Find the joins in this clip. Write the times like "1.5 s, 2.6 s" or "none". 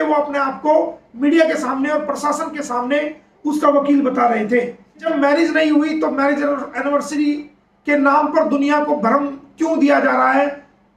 5.0 s

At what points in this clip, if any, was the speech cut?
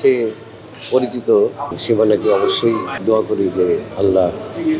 1.8 s, 2.9 s, 3.9 s

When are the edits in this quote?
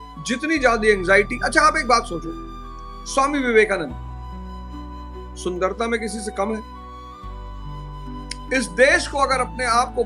6.6 s, 8.5 s

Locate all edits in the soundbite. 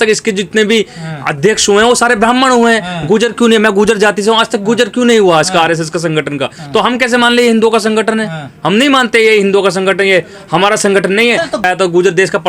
11.5 s

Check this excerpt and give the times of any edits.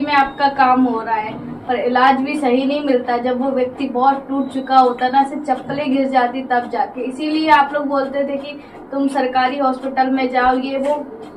none

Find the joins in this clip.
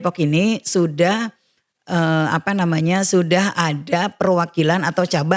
none

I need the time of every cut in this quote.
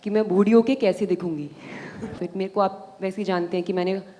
2.2 s

